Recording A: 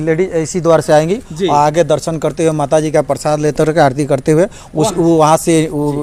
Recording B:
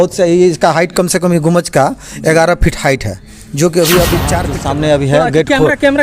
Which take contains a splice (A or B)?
B